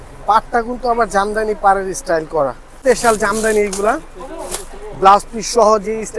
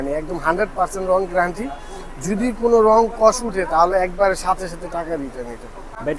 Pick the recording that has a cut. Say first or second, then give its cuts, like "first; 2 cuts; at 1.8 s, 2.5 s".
first; 1 cut; at 2.7 s